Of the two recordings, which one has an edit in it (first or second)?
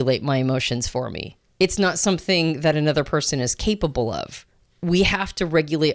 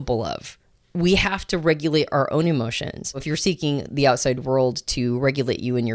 second